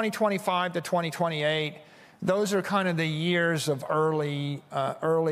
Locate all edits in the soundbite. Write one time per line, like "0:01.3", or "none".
none